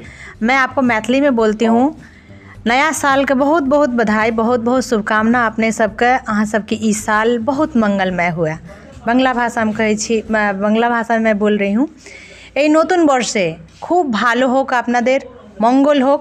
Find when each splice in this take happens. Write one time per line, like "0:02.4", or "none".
none

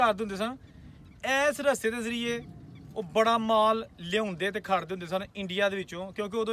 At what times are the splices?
none

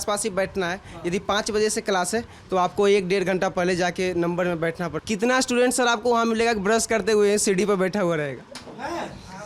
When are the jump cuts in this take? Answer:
0:04.9

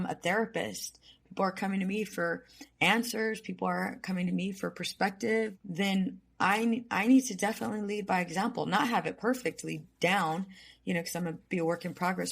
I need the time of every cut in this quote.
0:05.6

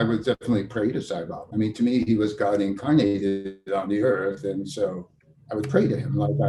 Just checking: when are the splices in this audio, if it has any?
0:01.4

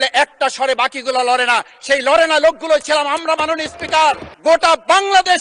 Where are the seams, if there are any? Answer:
0:04.3

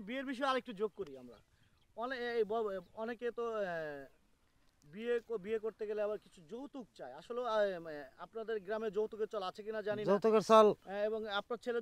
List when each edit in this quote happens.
none

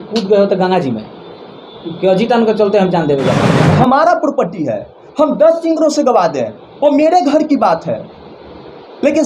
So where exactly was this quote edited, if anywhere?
0:03.6

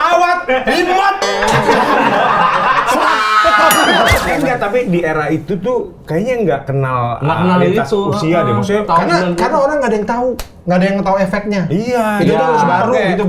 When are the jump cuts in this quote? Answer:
0:04.2

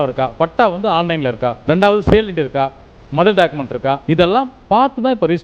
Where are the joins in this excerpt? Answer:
0:01.6
0:04.0

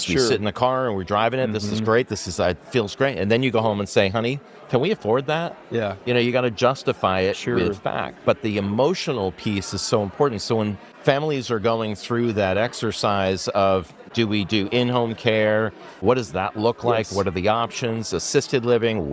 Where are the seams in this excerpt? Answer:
0:10.9
0:14.0
0:16.0

